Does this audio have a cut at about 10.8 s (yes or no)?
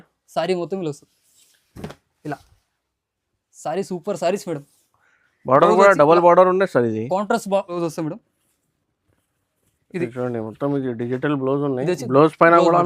no